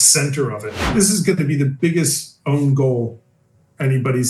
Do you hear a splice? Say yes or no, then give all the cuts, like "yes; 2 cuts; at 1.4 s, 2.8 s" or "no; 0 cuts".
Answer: yes; 1 cut; at 0.9 s